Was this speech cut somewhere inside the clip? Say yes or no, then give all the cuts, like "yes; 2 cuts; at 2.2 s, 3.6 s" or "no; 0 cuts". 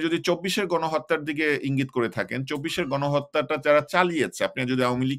no; 0 cuts